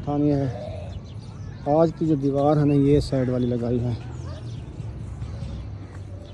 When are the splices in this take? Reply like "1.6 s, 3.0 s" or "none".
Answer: none